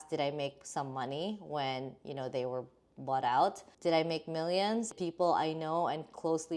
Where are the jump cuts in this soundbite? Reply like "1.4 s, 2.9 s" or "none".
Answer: 3.7 s, 4.9 s